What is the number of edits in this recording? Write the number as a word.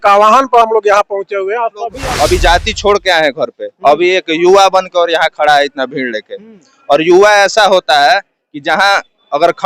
one